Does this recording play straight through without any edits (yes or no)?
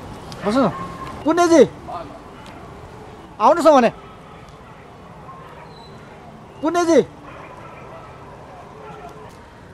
no